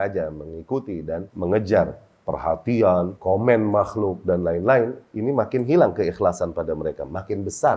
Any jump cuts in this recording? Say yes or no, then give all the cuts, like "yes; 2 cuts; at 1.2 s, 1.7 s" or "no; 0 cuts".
yes; 2 cuts; at 1.3 s, 3.2 s